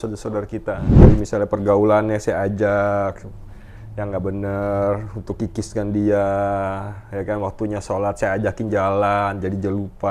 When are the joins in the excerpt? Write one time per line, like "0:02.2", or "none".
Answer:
0:01.0